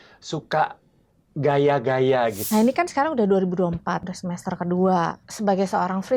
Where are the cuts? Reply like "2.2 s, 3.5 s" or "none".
2.4 s, 4.1 s, 5.2 s